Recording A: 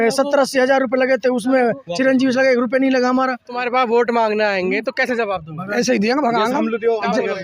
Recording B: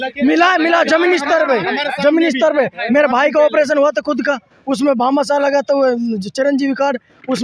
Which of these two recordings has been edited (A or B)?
A